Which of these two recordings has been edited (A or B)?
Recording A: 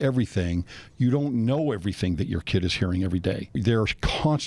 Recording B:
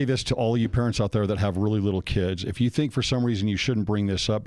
A